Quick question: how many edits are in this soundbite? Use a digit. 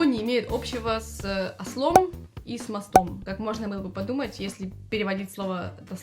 1